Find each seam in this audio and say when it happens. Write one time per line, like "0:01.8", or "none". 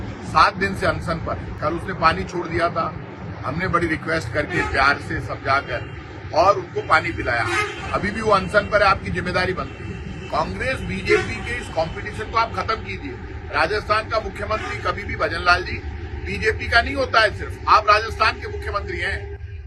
none